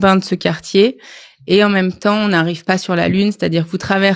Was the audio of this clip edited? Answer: no; 0 cuts

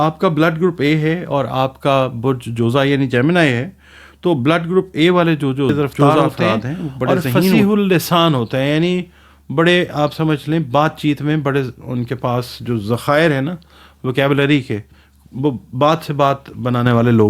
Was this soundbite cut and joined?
yes; 1 cut; at 7.5 s

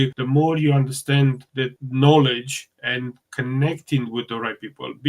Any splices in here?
yes; 1 cut; at 1.8 s

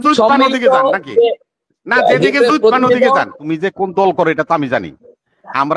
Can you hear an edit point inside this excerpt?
yes; 1 cut; at 3.4 s

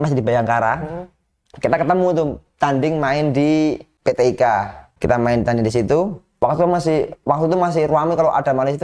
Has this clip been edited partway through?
yes; 3 cuts; at 3.9 s, 4.9 s, 6.2 s

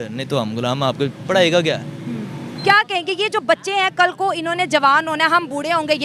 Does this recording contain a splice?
yes; 1 cut; at 2.5 s

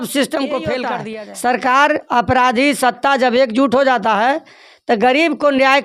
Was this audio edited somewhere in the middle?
yes; 1 cut; at 0.9 s

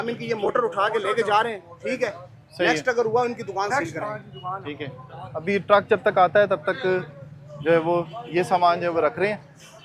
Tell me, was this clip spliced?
no; 0 cuts

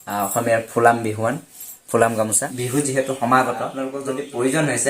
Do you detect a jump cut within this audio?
yes; 2 cuts; at 2.5 s, 3.7 s

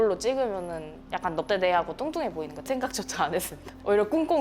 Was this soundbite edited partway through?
yes; 1 cut; at 2.5 s

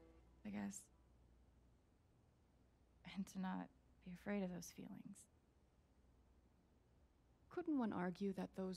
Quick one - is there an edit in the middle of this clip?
no; 0 cuts

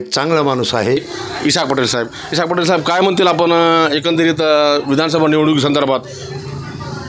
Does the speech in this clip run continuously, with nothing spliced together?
no; 1 cut; at 1.2 s

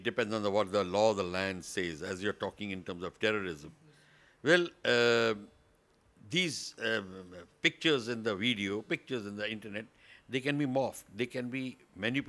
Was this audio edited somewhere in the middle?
no; 0 cuts

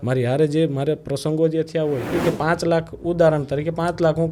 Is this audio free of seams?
no; 1 cut; at 2.2 s

